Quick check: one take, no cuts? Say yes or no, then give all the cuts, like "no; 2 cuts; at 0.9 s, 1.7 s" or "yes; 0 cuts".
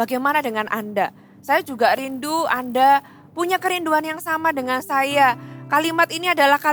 yes; 0 cuts